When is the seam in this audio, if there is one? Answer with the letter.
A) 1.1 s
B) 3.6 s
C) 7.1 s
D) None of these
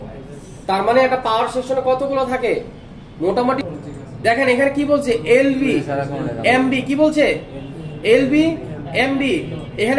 B